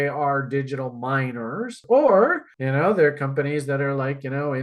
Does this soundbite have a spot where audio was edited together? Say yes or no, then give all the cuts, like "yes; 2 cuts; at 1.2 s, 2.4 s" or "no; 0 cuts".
yes; 1 cut; at 1.8 s